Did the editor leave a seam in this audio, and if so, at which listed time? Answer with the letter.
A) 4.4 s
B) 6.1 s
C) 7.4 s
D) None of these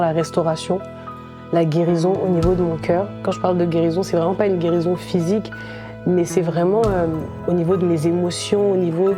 C